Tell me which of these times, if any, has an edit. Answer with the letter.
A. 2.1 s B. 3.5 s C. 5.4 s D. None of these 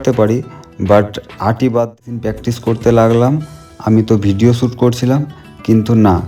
A